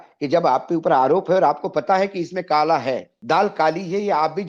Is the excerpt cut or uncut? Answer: cut